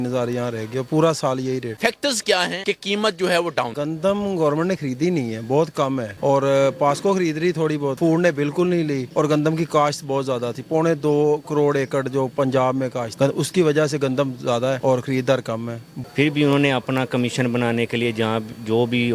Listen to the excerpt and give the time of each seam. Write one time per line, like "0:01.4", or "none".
0:15.8